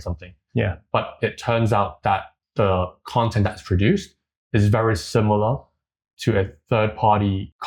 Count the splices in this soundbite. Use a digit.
0